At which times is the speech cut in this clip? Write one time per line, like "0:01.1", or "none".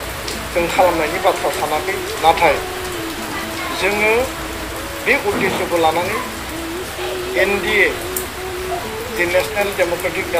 none